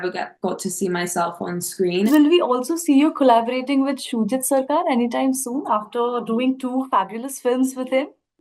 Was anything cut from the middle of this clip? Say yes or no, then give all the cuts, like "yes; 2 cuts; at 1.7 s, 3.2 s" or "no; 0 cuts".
yes; 1 cut; at 2.1 s